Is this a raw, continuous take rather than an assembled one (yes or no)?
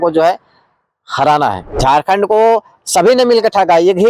no